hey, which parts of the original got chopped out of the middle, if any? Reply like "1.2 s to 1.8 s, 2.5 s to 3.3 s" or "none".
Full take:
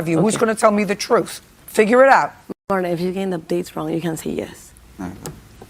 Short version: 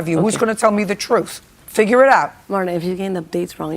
2.4 s to 2.6 s